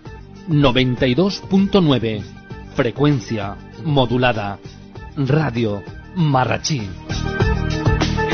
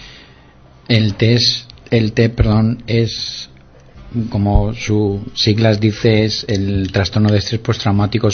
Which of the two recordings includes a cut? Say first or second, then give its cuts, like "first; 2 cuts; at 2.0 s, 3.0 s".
second; 1 cut; at 1.1 s